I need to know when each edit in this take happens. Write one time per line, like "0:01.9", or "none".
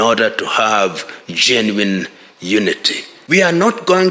0:03.1